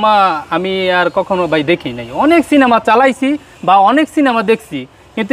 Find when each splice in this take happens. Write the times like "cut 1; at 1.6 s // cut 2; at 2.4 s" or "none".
none